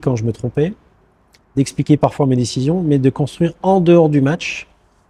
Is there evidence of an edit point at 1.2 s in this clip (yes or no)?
no